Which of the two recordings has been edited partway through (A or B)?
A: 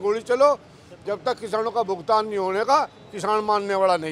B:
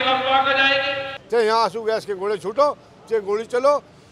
B